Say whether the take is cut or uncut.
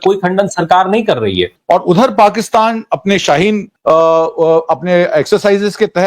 cut